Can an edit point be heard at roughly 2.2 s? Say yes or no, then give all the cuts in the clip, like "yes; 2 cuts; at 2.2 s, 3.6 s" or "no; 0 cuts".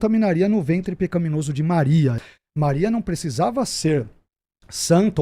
yes; 1 cut; at 2.2 s